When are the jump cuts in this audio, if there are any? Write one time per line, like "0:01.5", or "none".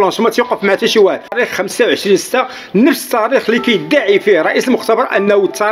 0:01.3